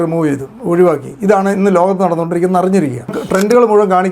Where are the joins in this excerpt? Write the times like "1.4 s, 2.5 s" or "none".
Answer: 3.2 s